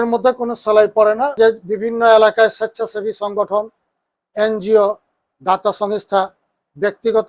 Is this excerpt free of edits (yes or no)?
no